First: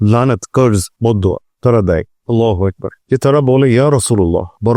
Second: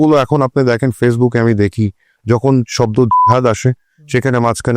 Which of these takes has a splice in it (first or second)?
first